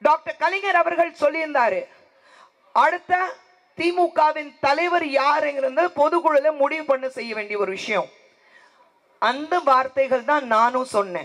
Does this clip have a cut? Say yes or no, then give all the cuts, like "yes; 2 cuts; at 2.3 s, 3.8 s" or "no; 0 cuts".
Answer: no; 0 cuts